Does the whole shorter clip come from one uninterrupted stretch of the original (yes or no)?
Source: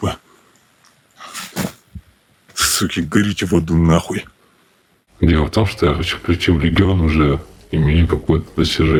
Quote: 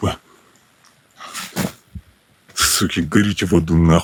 yes